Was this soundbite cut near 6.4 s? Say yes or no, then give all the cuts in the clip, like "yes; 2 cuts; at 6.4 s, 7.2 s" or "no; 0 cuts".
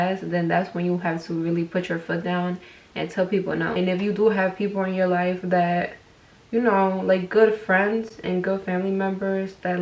no; 1 cut; at 3.7 s